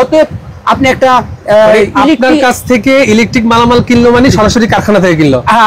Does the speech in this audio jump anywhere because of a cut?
no; 0 cuts

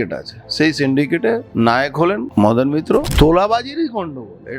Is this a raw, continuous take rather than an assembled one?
no; 3 cuts; at 1.5 s, 2.3 s, 3.1 s

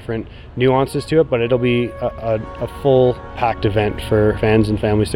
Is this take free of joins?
no; 2 cuts; at 3.4 s, 4.4 s

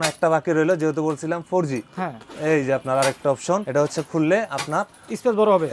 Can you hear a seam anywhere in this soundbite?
no; 0 cuts

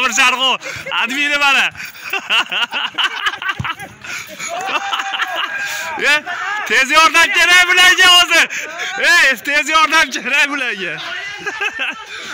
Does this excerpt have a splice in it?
no; 0 cuts

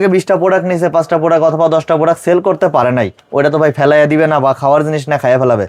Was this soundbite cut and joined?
no; 0 cuts

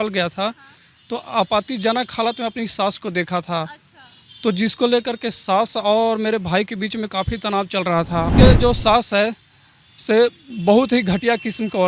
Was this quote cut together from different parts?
yes; 1 cut; at 8.3 s

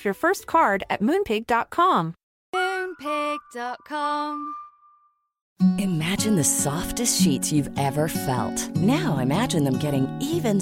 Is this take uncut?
no; 1 cut; at 5.4 s

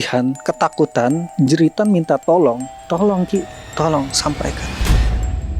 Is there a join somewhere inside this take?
yes; 3 cuts; at 1.3 s, 2.7 s, 4.6 s

